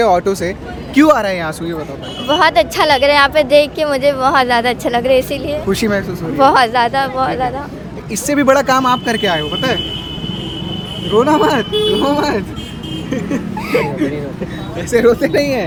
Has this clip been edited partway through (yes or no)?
no